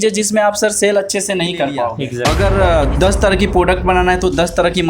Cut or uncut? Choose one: cut